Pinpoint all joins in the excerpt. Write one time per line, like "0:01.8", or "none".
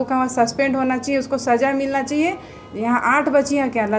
none